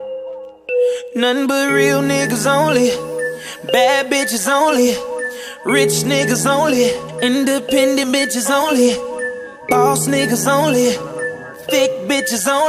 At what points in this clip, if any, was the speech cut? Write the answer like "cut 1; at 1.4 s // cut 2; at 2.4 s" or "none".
cut 1; at 1.1 s